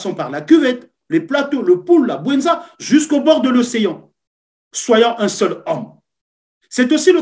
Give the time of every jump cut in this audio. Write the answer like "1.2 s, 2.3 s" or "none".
none